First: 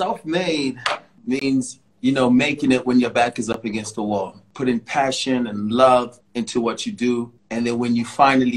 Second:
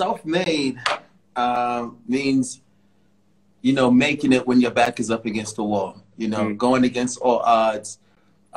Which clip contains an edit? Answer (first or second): first